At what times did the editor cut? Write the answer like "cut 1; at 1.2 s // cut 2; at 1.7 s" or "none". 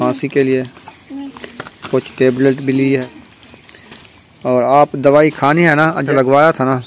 cut 1; at 3.0 s // cut 2; at 6.1 s